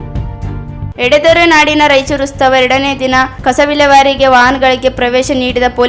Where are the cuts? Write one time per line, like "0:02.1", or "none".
0:00.9